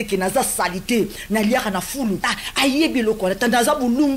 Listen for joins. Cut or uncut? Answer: cut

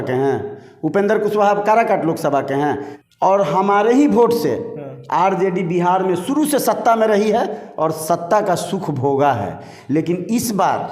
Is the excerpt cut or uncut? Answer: cut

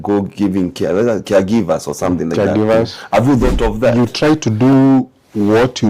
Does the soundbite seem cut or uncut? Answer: cut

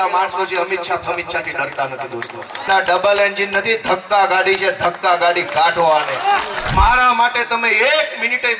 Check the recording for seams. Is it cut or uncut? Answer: cut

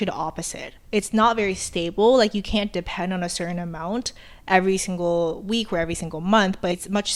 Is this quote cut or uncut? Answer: uncut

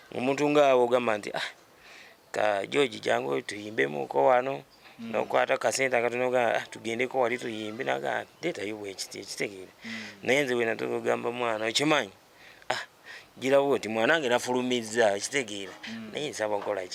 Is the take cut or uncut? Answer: uncut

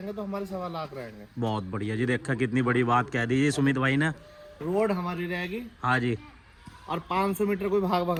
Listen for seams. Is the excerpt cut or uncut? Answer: uncut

